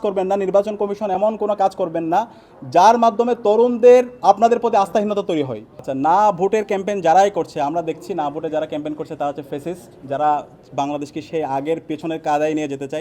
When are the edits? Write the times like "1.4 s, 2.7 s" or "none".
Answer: 5.7 s